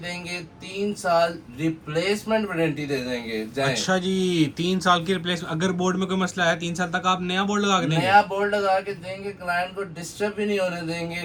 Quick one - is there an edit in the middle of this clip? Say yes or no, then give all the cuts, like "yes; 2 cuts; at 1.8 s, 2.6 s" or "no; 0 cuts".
no; 0 cuts